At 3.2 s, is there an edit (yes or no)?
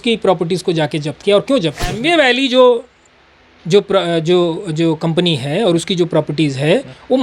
no